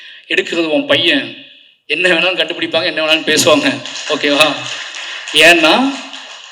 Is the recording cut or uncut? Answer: uncut